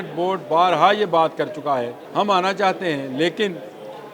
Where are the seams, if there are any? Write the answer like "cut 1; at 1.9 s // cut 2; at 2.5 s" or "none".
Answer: cut 1; at 2.0 s